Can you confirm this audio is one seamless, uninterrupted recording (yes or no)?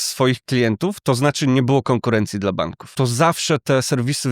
no